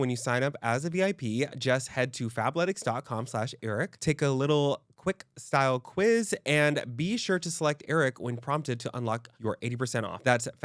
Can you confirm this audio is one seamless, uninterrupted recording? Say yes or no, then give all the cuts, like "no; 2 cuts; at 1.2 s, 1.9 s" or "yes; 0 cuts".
yes; 0 cuts